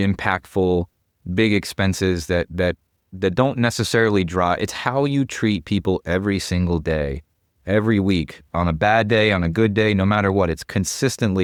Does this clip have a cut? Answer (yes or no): no